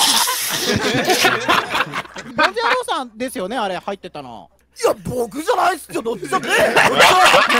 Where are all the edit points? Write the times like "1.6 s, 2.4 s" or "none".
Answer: 2.3 s, 4.4 s